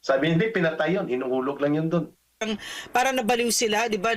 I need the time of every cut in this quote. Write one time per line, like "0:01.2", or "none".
0:02.4